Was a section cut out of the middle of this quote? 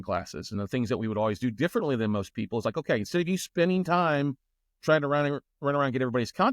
no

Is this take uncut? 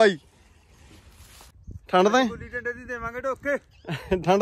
no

